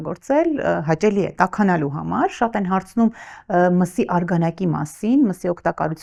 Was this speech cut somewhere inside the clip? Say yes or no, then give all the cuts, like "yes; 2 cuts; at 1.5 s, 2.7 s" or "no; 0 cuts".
no; 0 cuts